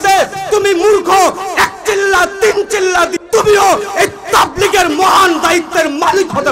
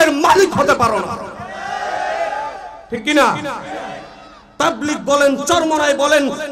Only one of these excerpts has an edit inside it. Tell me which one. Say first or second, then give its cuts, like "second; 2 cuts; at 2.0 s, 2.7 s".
first; 1 cut; at 3.1 s